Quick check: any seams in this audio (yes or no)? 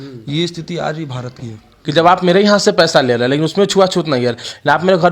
yes